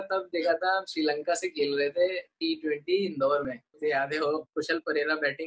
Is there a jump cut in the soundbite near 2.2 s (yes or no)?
no